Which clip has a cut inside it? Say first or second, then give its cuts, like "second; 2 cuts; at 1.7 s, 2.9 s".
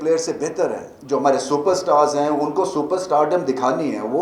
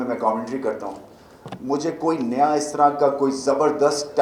first; 1 cut; at 0.9 s